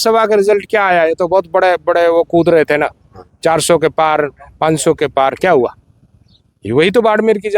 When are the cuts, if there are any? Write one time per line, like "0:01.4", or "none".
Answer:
none

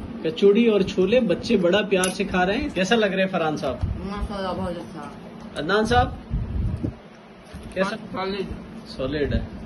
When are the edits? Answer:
0:02.7
0:07.9

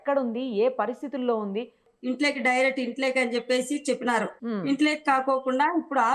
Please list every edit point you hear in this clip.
0:01.8

